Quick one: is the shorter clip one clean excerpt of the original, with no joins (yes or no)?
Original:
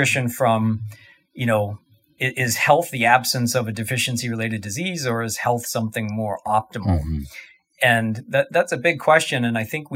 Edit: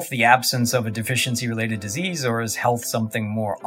yes